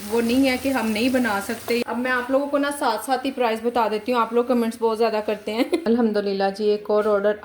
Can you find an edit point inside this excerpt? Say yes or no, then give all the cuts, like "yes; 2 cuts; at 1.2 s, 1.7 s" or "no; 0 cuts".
yes; 2 cuts; at 1.8 s, 5.8 s